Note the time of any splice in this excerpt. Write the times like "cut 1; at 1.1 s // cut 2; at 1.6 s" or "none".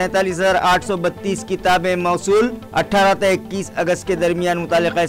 none